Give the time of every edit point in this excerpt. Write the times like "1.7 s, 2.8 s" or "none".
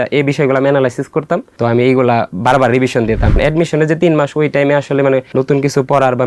1.5 s, 3.4 s, 5.3 s